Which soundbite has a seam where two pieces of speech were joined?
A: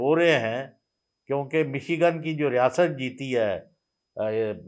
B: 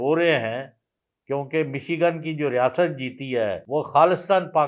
B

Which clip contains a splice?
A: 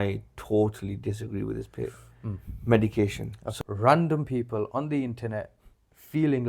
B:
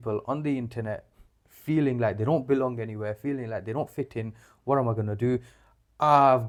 A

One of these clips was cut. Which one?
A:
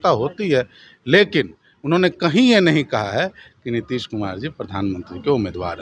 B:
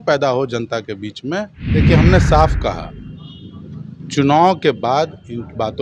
B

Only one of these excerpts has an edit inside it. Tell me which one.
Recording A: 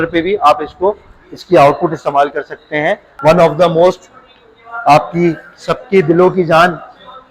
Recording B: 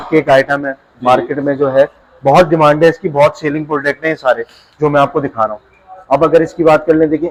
A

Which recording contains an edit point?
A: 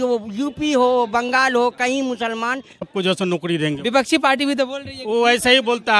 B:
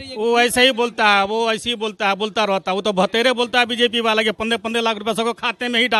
A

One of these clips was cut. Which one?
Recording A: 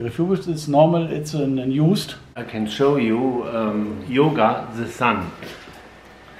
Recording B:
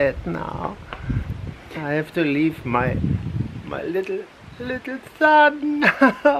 A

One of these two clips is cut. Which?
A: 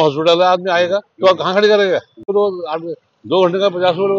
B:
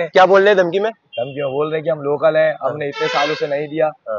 A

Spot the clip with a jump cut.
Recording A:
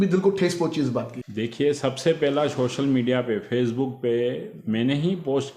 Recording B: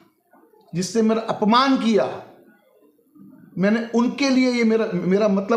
A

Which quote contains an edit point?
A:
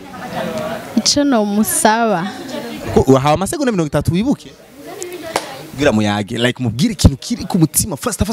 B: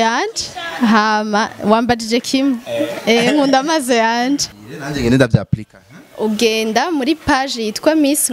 B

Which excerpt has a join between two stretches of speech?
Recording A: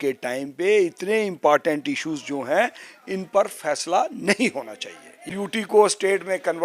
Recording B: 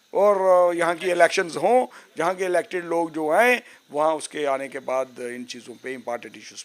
A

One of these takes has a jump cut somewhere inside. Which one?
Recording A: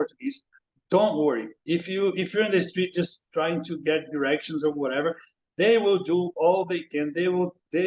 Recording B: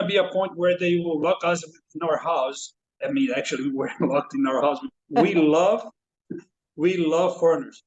B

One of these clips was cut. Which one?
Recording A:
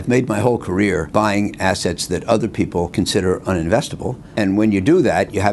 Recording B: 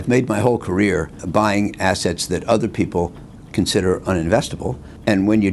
A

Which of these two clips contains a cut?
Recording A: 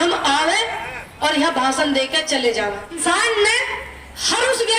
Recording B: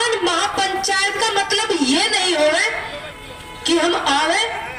A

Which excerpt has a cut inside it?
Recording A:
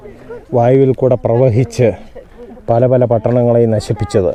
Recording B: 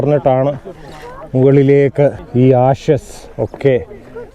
B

